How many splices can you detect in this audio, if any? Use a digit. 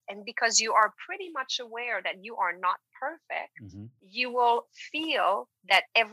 1